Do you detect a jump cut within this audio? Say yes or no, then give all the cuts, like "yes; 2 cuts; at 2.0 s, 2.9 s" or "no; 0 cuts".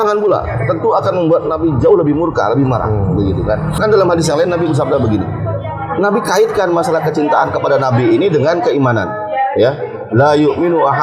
yes; 1 cut; at 3.8 s